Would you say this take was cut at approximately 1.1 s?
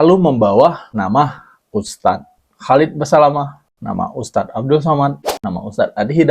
no; 2 cuts; at 3.6 s, 5.4 s

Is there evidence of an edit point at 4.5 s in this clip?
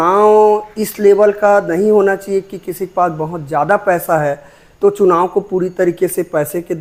no; 0 cuts

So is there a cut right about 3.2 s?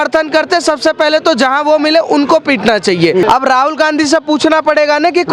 yes; 1 cut; at 3.2 s

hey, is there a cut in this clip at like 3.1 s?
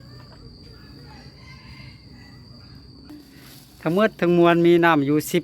yes; 1 cut; at 3.1 s

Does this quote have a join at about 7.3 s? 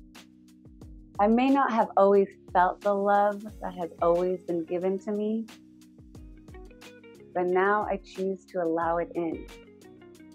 yes; 4 cuts; at 1.2 s, 5.5 s, 7.3 s, 9.5 s

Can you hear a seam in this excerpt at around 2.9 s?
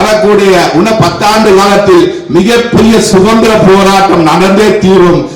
no; 0 cuts

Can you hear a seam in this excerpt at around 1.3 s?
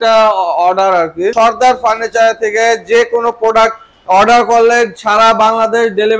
yes; 1 cut; at 1.3 s

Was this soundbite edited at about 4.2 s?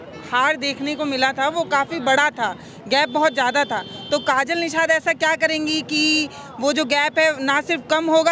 no; 0 cuts

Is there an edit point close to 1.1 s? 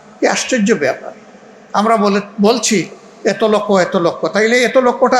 no; 0 cuts

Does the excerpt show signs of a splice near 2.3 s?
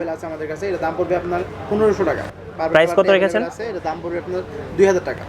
yes; 1 cut; at 2.3 s

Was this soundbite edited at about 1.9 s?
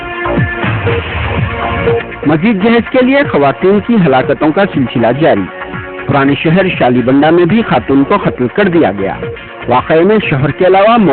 yes; 1 cut; at 1.9 s

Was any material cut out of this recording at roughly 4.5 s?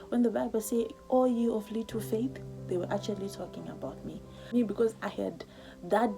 yes; 1 cut; at 4.5 s

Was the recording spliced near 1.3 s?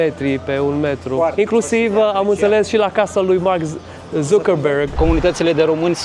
yes; 2 cuts; at 1.3 s, 4.9 s

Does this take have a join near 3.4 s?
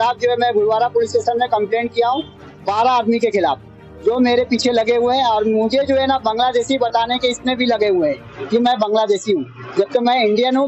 no; 0 cuts

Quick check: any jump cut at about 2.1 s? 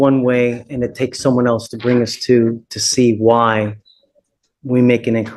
no; 0 cuts

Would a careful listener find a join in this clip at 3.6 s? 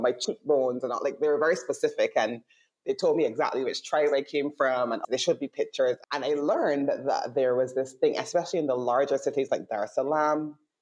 no; 2 cuts; at 5.0 s, 6.0 s

